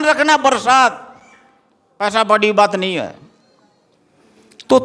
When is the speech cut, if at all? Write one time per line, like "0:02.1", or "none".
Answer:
none